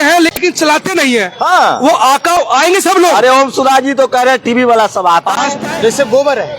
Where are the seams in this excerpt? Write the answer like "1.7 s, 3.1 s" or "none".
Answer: 5.6 s

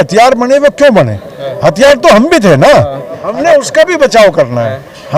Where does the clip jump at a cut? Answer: 3.2 s

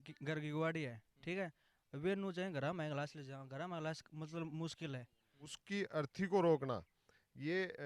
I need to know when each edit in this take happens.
5.6 s

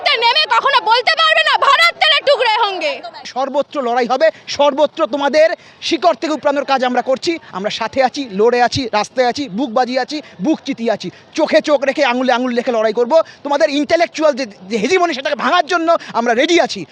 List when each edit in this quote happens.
3.2 s

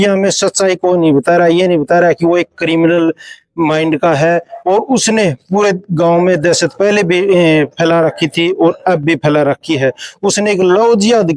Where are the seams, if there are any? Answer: none

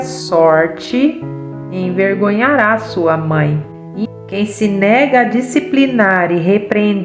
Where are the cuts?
4.1 s

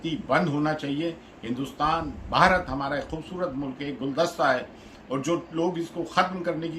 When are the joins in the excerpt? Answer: none

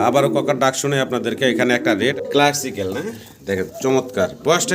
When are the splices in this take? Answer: 2.1 s

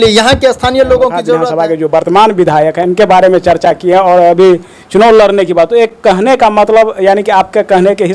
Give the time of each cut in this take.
1.5 s

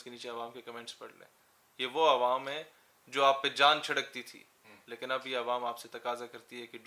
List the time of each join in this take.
none

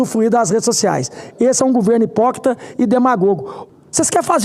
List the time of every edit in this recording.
3.5 s

